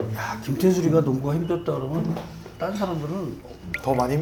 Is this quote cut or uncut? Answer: uncut